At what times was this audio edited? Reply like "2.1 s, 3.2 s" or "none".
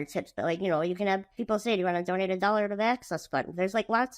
1.3 s